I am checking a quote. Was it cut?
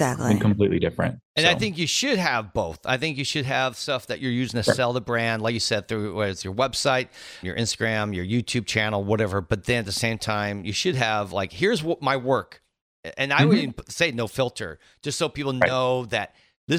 no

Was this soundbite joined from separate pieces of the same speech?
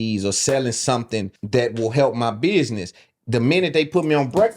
yes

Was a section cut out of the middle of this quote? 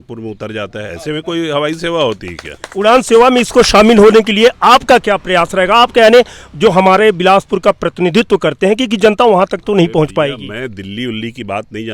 no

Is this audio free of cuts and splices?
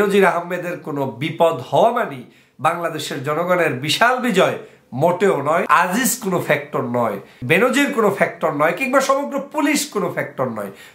no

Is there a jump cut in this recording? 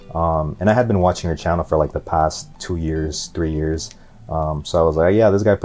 no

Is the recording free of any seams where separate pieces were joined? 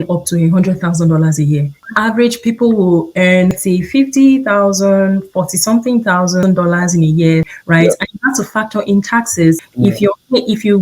no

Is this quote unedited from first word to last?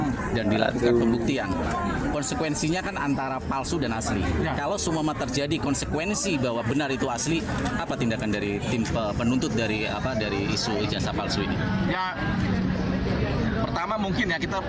yes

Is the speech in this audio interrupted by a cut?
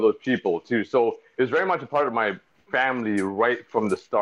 no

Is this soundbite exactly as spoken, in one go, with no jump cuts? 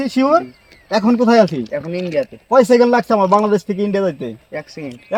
yes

